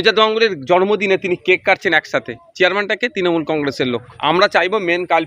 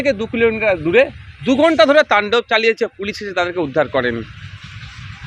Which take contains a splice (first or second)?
first